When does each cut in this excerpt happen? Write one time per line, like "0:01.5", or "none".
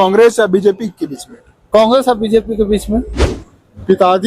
0:03.1